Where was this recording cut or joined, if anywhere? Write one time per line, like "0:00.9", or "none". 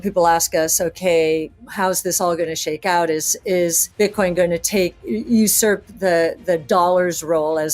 0:01.6
0:03.8